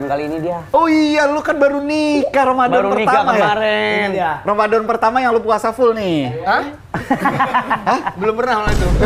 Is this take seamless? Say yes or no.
yes